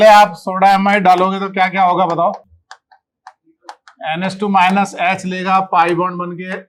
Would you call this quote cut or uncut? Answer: uncut